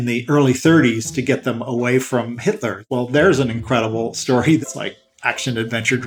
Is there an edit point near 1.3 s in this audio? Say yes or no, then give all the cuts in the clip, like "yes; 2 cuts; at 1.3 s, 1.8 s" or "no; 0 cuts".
no; 2 cuts; at 2.8 s, 4.6 s